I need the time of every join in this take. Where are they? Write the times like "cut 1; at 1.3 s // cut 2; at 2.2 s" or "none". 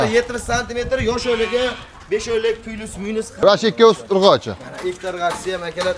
cut 1; at 3.4 s